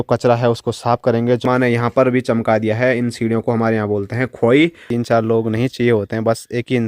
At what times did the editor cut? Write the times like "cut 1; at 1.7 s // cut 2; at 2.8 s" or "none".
cut 1; at 1.4 s // cut 2; at 4.8 s